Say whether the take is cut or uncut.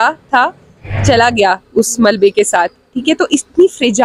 uncut